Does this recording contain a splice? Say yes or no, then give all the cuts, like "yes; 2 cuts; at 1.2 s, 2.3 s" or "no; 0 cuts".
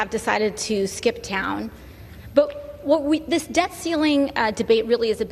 no; 0 cuts